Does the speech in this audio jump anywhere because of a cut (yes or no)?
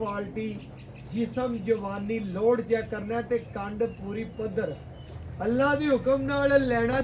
no